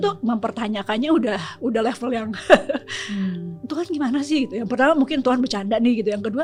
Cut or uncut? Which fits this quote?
uncut